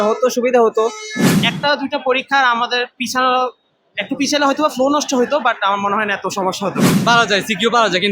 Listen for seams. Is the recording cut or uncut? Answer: cut